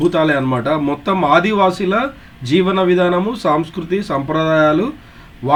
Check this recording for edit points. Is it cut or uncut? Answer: uncut